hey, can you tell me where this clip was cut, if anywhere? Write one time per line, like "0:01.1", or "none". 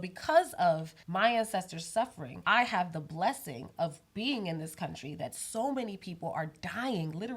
0:01.0
0:02.3